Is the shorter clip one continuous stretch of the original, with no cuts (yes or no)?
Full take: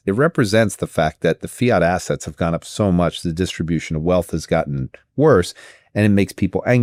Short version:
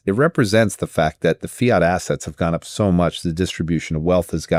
yes